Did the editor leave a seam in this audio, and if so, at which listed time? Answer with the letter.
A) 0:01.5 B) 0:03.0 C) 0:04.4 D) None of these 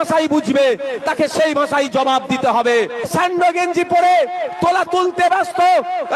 B